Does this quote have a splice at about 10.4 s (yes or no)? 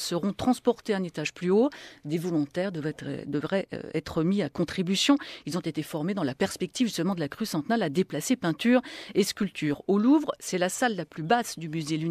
yes